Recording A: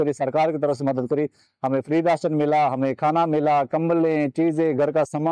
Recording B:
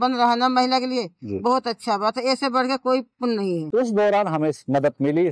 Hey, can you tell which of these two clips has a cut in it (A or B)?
B